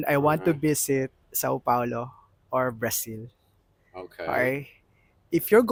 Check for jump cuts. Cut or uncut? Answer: uncut